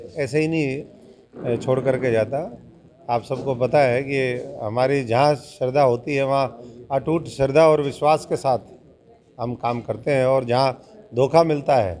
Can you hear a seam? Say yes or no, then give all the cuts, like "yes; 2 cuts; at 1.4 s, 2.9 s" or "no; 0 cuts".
no; 0 cuts